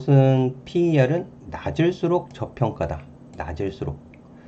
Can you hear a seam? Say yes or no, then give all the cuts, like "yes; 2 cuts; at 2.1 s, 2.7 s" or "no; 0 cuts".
no; 0 cuts